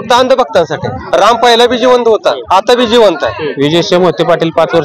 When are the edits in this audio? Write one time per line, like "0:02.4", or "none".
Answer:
0:00.9
0:02.4
0:03.5